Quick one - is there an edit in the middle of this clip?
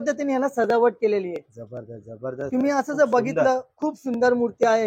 no; 0 cuts

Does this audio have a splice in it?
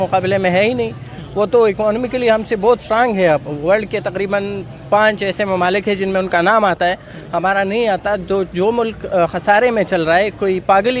no; 0 cuts

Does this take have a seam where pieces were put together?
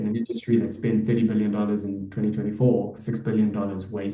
yes; 1 cut; at 3.0 s

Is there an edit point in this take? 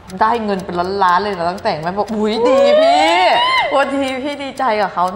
no; 0 cuts

